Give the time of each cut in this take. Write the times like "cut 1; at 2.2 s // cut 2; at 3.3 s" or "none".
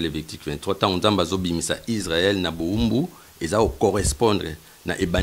none